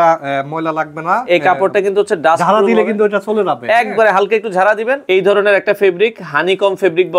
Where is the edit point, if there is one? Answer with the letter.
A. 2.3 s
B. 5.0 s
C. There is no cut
B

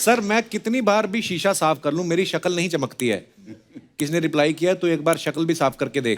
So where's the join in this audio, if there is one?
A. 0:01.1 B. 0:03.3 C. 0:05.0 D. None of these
D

